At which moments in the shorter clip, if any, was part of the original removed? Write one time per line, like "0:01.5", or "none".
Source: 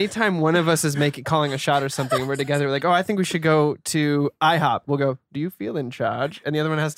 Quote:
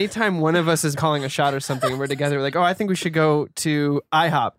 0:00.9